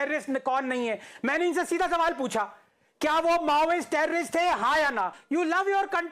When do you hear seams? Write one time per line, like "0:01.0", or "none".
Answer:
0:05.2